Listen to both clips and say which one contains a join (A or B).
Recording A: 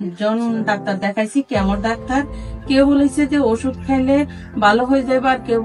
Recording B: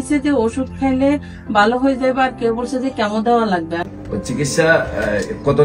B